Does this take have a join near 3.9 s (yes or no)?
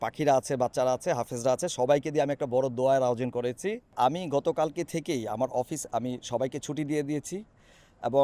yes